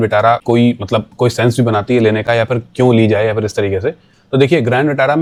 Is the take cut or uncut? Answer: uncut